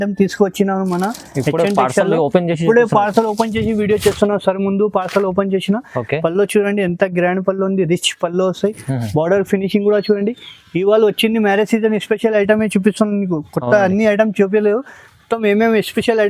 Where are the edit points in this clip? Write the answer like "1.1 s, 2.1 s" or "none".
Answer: none